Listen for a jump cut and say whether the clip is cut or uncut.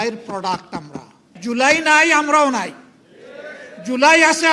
cut